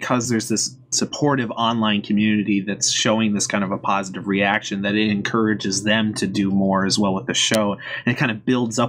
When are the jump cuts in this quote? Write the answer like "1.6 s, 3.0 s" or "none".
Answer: 5.8 s